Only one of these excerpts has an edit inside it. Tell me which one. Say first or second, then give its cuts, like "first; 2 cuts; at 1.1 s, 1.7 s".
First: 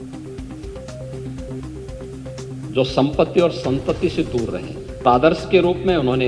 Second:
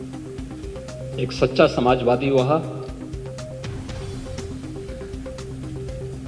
first; 3 cuts; at 1.0 s, 2.7 s, 5.0 s